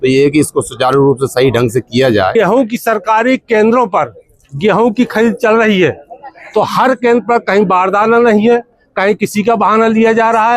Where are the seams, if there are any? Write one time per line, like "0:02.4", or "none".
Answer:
0:02.3